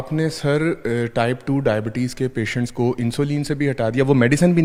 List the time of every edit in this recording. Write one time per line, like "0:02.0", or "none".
none